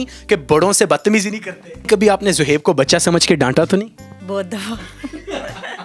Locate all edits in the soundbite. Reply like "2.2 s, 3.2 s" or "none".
1.9 s

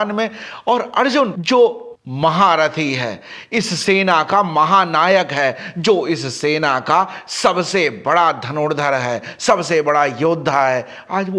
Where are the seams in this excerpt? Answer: none

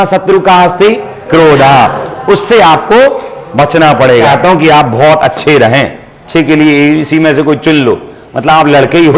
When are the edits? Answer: 4.3 s, 6.1 s

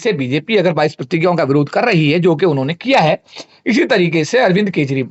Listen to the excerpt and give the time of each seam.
none

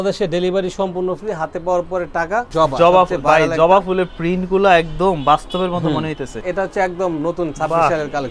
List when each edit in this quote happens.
2.5 s, 6.4 s

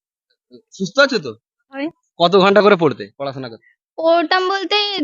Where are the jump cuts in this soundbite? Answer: 1.9 s

